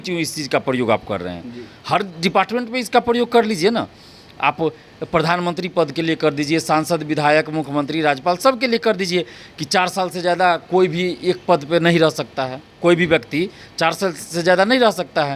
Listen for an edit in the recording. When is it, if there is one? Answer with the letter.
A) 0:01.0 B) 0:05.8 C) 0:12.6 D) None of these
D